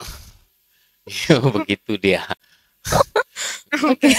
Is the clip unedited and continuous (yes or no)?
yes